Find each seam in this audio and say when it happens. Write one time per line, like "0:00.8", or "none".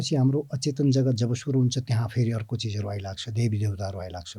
none